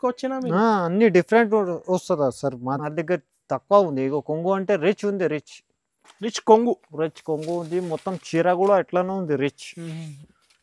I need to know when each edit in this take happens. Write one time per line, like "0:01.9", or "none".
0:02.8